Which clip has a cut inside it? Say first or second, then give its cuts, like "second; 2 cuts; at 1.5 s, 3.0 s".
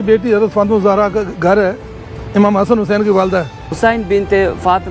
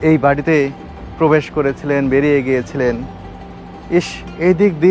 first; 1 cut; at 3.7 s